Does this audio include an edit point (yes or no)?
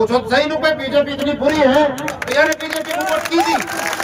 no